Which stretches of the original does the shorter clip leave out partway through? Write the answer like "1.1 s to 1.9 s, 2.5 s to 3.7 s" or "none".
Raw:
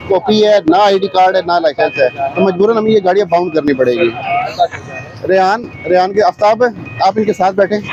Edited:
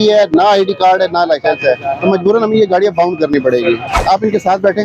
4.2 s to 6.8 s